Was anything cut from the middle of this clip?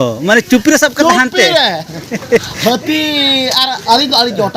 no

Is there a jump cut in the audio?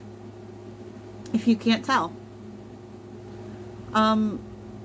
no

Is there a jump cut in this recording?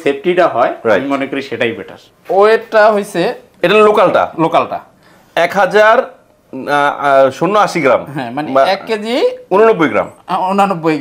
yes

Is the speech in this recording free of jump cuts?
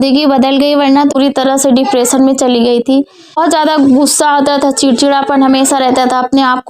no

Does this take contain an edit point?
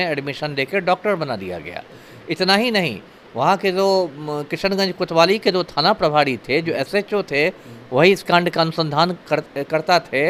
no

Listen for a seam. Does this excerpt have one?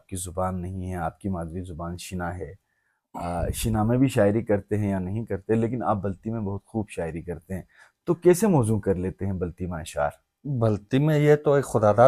no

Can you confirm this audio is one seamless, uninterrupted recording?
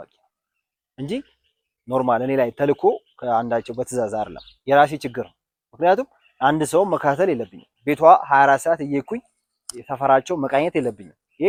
yes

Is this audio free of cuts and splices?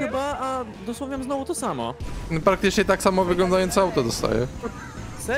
no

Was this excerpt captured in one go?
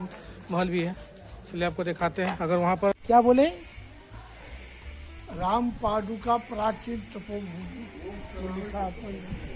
no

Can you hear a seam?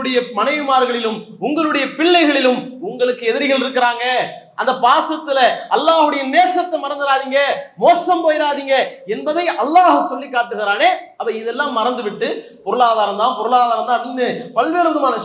yes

